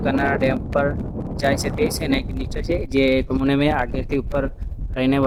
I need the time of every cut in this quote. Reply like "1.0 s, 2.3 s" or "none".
none